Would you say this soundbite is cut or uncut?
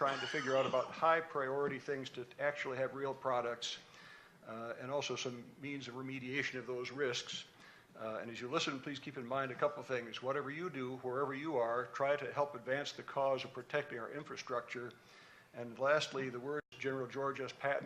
cut